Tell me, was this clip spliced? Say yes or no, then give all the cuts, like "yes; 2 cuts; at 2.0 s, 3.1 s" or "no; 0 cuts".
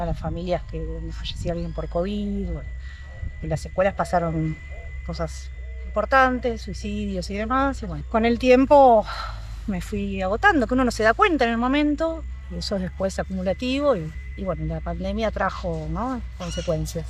no; 0 cuts